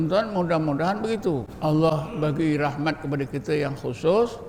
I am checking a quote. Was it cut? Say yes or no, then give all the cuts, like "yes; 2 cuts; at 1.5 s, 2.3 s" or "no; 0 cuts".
yes; 1 cut; at 1.5 s